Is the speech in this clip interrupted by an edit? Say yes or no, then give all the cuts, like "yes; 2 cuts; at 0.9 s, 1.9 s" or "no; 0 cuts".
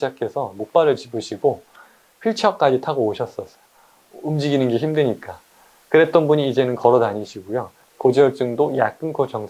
no; 0 cuts